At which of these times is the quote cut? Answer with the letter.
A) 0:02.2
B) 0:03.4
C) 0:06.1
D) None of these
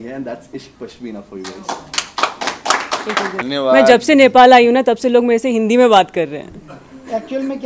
B